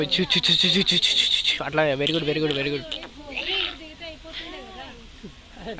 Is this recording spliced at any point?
no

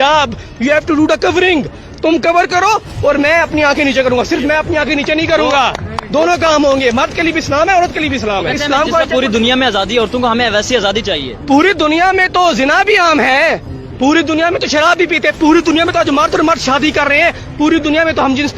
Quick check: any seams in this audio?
yes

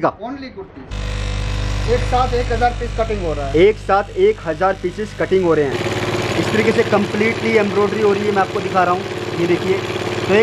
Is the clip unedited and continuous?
no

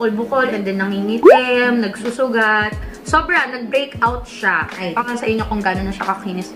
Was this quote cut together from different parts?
yes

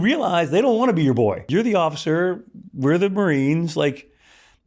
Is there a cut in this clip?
yes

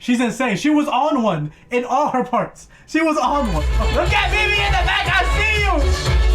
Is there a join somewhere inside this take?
yes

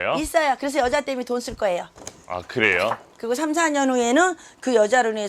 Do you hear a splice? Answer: yes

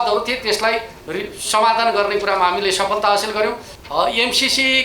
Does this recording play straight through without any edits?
no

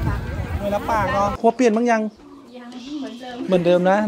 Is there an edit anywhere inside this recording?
yes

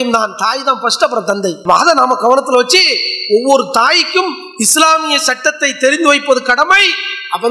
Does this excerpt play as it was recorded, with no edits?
yes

